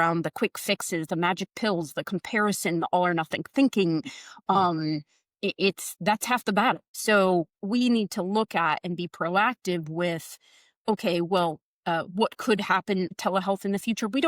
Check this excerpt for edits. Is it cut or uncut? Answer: cut